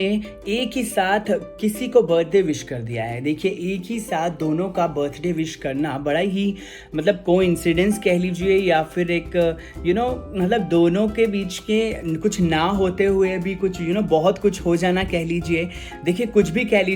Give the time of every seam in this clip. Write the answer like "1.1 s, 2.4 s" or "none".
14.8 s